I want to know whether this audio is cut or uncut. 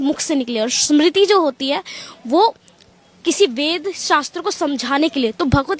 uncut